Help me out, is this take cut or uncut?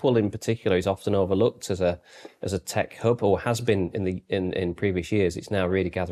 uncut